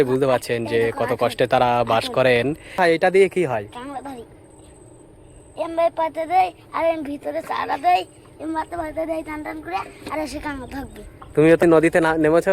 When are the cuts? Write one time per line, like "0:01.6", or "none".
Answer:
0:02.8
0:11.6